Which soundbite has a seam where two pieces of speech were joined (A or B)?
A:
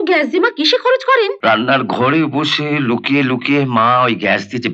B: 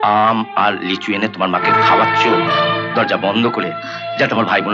A